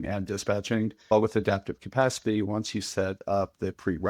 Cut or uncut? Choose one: cut